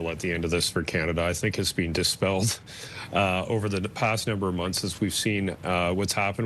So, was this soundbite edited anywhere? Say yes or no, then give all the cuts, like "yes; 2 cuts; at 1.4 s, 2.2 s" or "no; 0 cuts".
no; 0 cuts